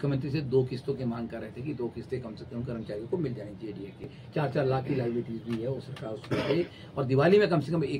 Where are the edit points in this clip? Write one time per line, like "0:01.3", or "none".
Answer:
0:04.2